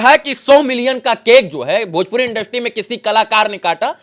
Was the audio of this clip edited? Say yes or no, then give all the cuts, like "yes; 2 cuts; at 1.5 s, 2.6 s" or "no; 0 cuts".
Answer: no; 0 cuts